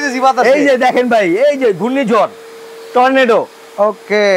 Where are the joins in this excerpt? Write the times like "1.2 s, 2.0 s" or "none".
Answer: none